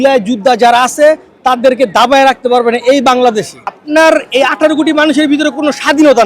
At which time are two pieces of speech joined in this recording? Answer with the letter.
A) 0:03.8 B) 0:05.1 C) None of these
A